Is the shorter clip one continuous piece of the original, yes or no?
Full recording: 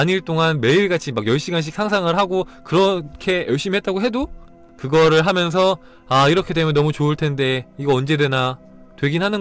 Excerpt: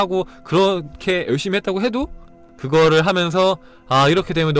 yes